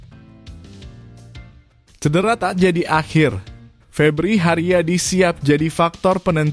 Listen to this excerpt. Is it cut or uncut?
cut